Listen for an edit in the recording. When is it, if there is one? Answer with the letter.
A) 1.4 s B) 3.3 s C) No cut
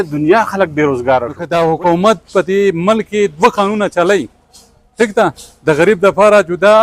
A